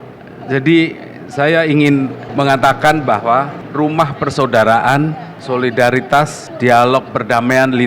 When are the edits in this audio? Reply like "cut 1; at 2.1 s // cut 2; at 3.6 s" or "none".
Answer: cut 1; at 2.2 s // cut 2; at 3.6 s // cut 3; at 5.3 s // cut 4; at 6.4 s